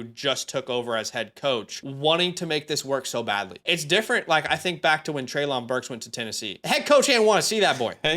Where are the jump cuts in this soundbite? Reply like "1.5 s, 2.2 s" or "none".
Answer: 1.8 s, 3.5 s, 6.5 s